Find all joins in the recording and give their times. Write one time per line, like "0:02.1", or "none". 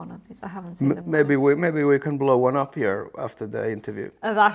none